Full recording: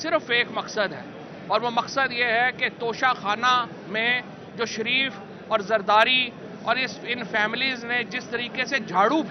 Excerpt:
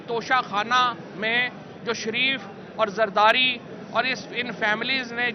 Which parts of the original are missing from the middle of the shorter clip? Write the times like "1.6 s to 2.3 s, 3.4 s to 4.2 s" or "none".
none